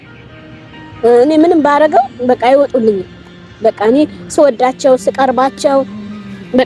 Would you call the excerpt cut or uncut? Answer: uncut